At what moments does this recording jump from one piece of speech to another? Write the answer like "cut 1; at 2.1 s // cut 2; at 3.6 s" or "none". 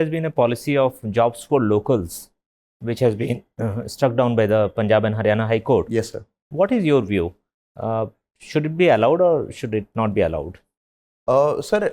none